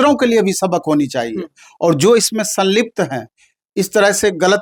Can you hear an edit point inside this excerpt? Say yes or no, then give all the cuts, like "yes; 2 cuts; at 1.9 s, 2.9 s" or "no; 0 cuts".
no; 0 cuts